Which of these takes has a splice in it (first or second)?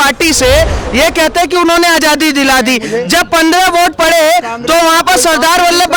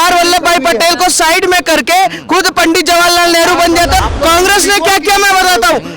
second